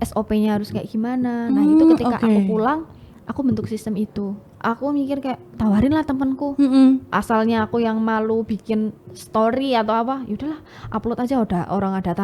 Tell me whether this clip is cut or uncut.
cut